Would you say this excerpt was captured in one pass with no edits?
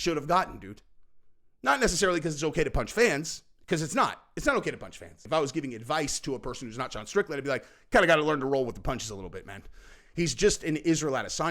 no; 1 cut; at 5.1 s

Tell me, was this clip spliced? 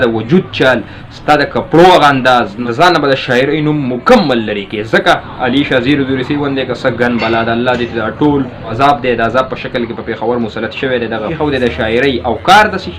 yes; 4 cuts; at 2.6 s, 5.3 s, 8.7 s, 11.3 s

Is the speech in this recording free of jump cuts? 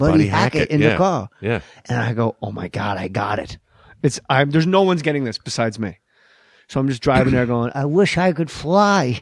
yes; 0 cuts

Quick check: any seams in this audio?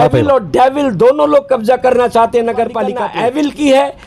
yes; 1 cut; at 3.0 s

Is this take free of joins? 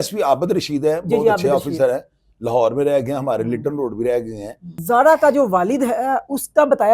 no; 1 cut; at 4.7 s

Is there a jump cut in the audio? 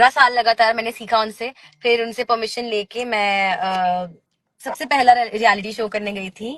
no; 0 cuts

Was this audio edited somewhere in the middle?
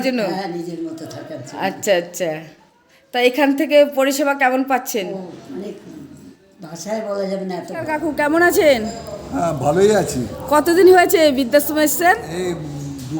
yes; 1 cut; at 7.9 s

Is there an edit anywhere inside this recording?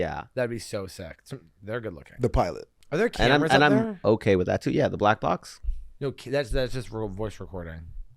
yes; 1 cut; at 2.8 s

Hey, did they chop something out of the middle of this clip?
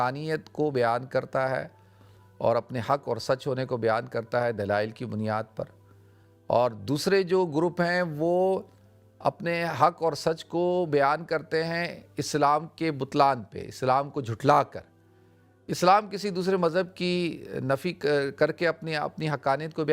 no; 0 cuts

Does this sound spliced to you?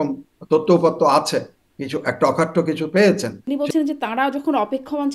yes; 1 cut; at 3.4 s

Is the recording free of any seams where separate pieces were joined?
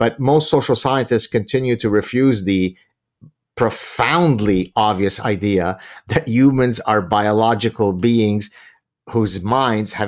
yes; 0 cuts

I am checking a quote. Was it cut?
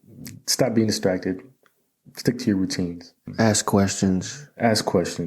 yes; 1 cut; at 3.2 s

